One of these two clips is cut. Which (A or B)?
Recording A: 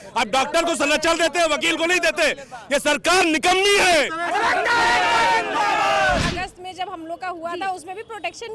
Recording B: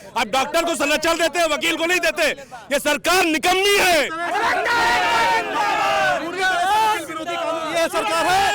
A